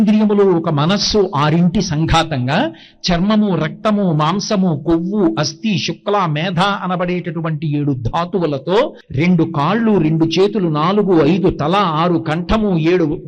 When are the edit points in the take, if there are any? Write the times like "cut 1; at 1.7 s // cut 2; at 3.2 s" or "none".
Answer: cut 1; at 9.0 s

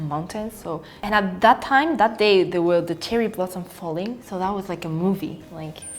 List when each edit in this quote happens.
cut 1; at 0.9 s

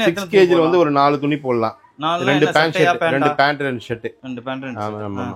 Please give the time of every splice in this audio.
none

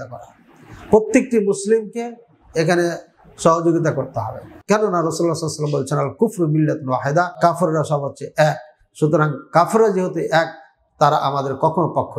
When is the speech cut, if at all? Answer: cut 1; at 4.5 s // cut 2; at 7.4 s

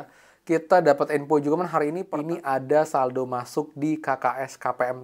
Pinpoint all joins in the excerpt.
cut 1; at 2.0 s

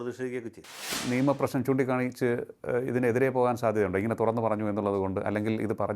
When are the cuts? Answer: cut 1; at 0.9 s

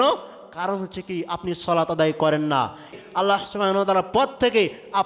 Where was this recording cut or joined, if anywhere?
cut 1; at 2.9 s

